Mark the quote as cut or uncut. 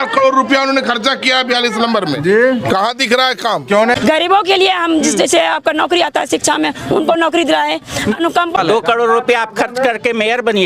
cut